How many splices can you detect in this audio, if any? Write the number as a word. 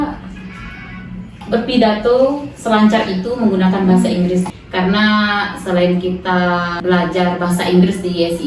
two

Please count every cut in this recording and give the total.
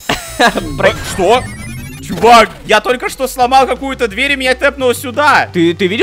zero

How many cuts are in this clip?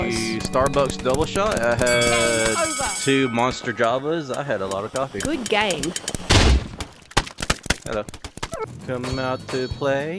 one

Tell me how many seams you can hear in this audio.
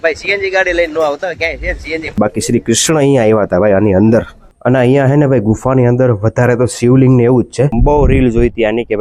three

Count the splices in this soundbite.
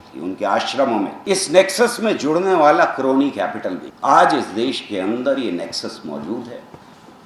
two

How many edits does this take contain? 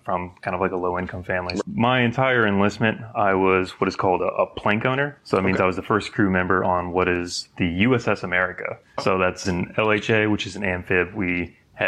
two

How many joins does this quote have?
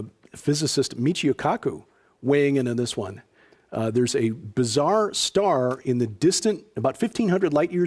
zero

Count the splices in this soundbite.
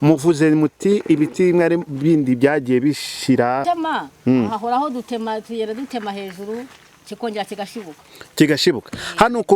one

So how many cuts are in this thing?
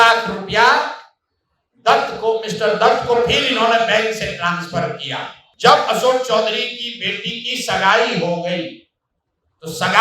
one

